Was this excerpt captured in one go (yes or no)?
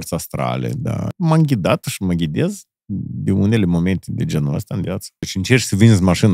no